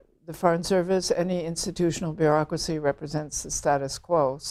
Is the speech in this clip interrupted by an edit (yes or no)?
no